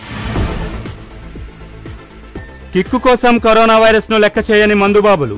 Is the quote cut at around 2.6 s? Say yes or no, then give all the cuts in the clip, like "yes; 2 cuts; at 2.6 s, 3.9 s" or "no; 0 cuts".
yes; 1 cut; at 2.6 s